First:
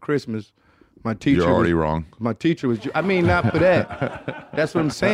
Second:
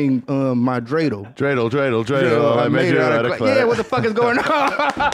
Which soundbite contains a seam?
second; 1 cut; at 1.3 s

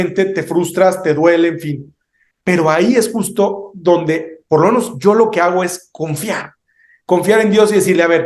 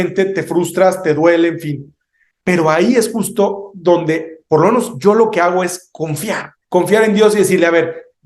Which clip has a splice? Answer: second; 1 cut; at 6.5 s

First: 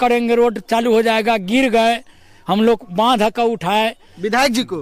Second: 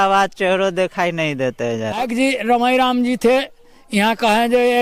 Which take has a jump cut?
second; 1 cut; at 2.0 s

